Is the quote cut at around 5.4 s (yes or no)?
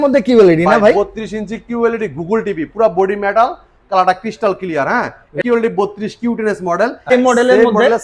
yes